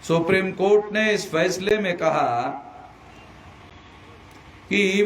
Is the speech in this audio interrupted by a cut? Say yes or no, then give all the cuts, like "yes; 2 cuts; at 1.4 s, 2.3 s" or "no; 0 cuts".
no; 0 cuts